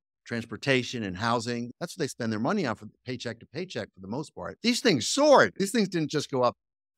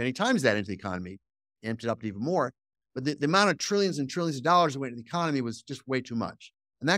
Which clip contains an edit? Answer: first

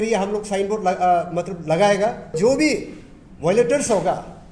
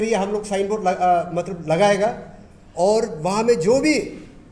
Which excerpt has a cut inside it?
first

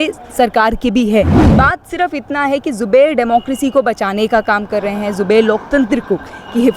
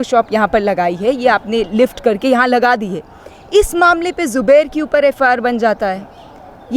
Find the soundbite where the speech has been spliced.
first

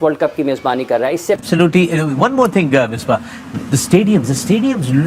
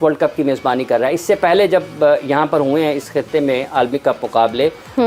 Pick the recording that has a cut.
first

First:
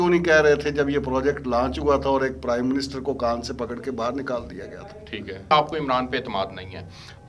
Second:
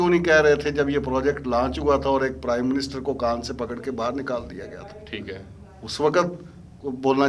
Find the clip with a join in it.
first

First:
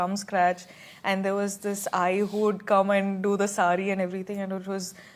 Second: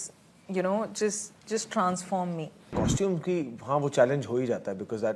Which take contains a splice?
second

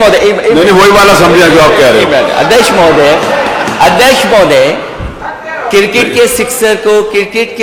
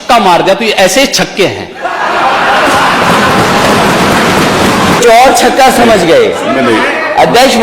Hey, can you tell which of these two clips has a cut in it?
second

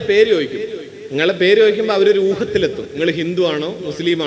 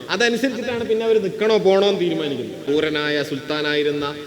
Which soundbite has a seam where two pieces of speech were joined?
second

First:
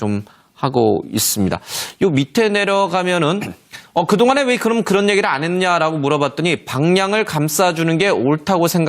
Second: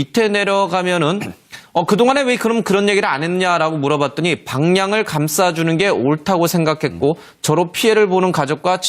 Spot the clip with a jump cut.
first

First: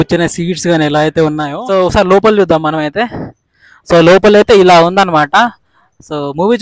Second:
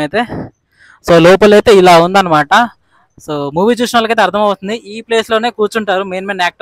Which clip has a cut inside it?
first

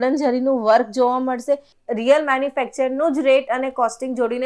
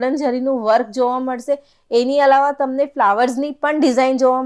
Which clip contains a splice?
first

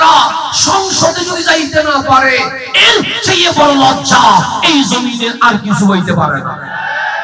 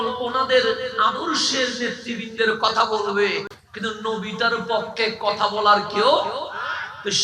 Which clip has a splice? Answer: second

